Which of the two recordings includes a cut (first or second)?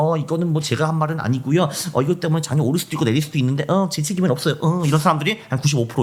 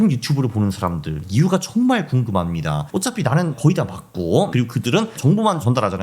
second